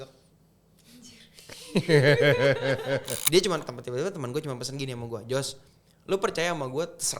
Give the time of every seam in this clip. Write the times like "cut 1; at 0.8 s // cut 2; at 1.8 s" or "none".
cut 1; at 3.1 s